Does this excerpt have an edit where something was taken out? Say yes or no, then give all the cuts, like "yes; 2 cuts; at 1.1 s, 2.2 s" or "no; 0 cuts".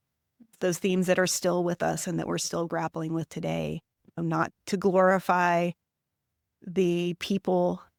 no; 0 cuts